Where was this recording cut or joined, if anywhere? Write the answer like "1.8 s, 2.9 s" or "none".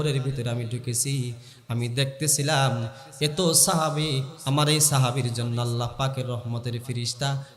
none